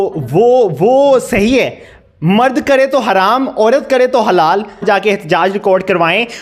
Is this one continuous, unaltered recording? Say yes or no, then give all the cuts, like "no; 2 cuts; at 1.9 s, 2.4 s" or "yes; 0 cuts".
no; 1 cut; at 4.8 s